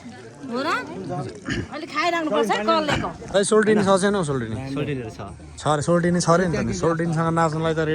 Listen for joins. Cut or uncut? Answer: cut